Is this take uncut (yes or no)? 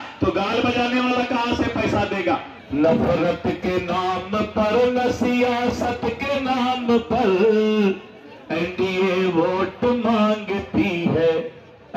no